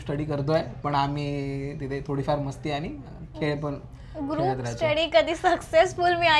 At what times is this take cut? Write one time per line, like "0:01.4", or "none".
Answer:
none